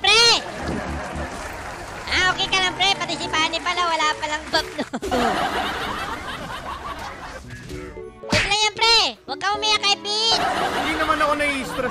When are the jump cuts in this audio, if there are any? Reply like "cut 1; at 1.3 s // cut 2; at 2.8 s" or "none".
cut 1; at 7.4 s